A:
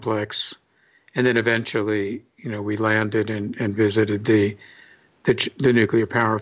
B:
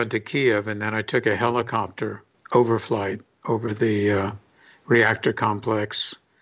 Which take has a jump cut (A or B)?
B